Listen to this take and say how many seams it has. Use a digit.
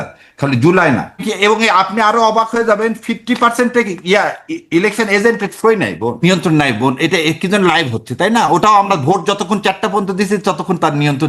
2